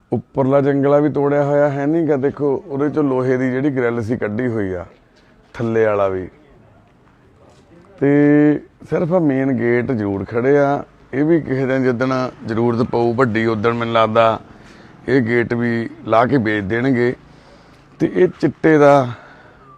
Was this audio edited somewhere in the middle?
yes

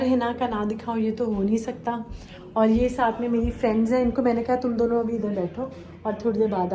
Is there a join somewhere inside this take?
no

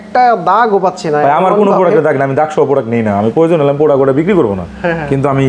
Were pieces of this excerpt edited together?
no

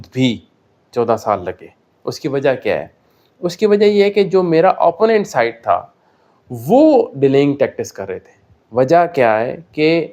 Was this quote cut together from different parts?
no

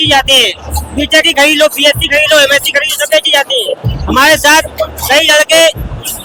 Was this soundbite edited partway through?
no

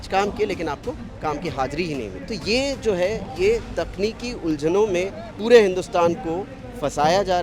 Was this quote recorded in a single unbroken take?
no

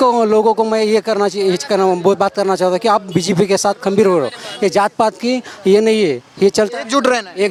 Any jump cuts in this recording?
no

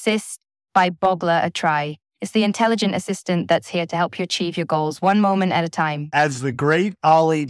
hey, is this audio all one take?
no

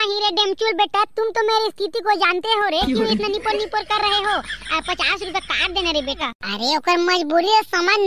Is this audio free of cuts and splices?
no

